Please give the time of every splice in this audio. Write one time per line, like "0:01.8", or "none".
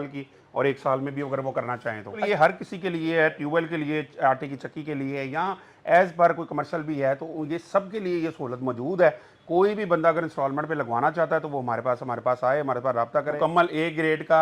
0:02.2
0:13.4